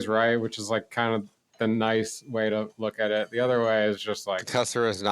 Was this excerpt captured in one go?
no; 2 cuts; at 1.5 s, 2.7 s

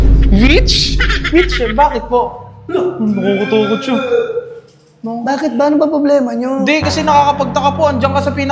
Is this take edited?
no; 0 cuts

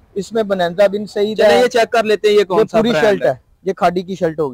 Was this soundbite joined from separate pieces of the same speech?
no; 0 cuts

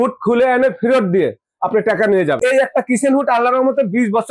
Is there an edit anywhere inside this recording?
yes; 1 cut; at 2.4 s

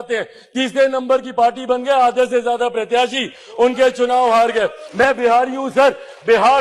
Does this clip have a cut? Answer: yes; 1 cut; at 4.8 s

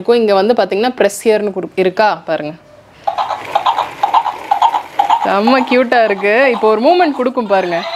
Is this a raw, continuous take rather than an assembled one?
yes; 0 cuts

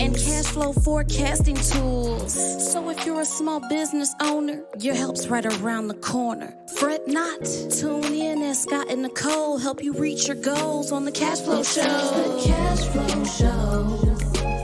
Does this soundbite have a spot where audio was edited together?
no; 0 cuts

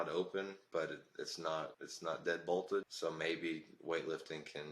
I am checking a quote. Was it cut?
yes; 2 cuts; at 1.8 s, 2.9 s

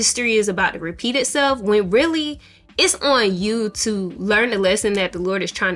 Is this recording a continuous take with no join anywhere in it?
yes; 0 cuts

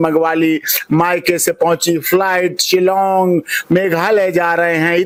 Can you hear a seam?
no; 0 cuts

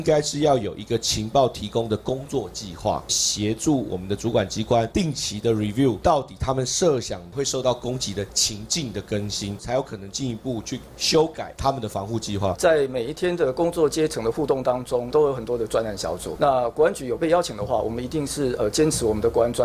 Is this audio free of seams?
no; 6 cuts; at 3.1 s, 7.2 s, 9.6 s, 11.5 s, 12.6 s, 15.1 s

